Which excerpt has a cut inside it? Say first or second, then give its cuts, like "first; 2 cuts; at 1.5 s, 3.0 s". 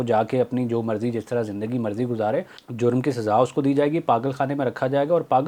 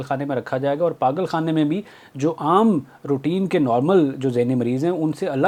first; 1 cut; at 2.6 s